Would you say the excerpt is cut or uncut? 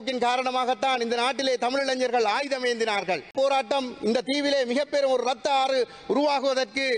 cut